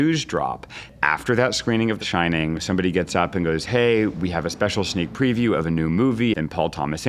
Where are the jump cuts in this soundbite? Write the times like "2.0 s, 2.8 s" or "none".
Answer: 0.9 s, 2.3 s, 6.3 s